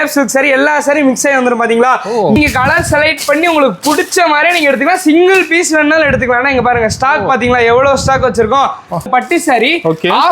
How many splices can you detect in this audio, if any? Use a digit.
2